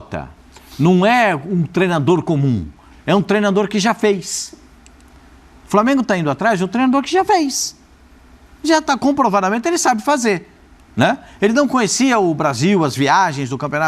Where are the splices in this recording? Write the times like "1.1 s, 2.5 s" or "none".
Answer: none